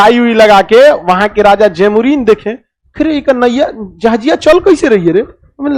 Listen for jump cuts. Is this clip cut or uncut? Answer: uncut